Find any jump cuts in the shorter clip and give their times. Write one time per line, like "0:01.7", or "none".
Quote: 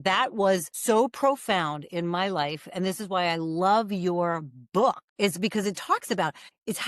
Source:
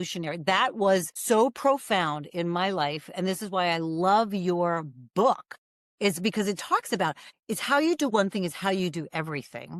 0:05.1